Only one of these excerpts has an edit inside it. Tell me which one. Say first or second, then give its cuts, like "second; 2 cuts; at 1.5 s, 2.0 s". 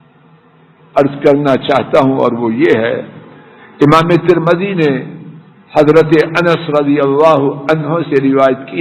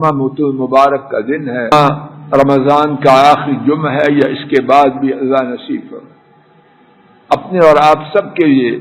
second; 1 cut; at 1.7 s